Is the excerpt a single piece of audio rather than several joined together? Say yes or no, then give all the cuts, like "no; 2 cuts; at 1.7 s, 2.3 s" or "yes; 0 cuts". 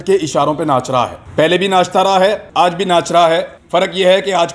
no; 3 cuts; at 1.2 s, 2.4 s, 3.6 s